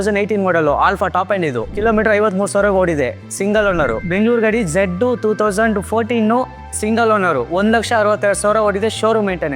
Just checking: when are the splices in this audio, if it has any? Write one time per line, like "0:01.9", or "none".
0:01.7
0:04.0